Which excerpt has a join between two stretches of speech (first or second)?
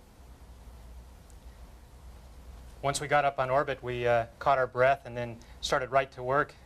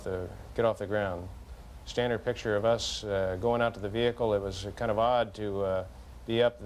first